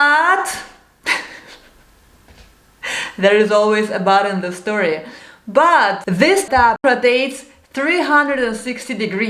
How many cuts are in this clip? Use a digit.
0